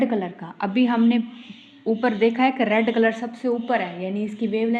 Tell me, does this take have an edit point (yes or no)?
no